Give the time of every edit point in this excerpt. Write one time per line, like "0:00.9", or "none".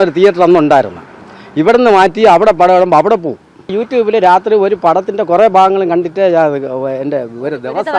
0:03.8